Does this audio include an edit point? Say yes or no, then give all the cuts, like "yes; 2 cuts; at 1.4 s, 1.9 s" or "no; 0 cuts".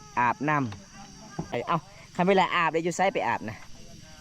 yes; 1 cut; at 1.6 s